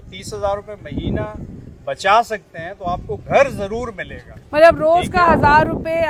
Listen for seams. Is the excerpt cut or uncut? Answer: uncut